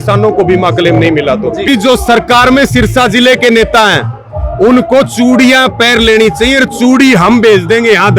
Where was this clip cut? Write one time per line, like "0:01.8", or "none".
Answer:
0:01.6